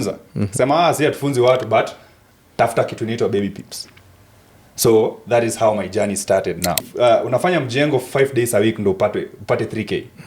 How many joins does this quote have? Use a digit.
1